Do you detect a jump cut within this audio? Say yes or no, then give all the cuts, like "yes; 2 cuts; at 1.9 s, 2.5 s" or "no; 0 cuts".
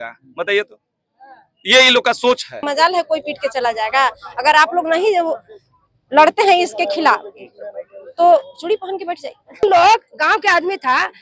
yes; 2 cuts; at 2.6 s, 9.6 s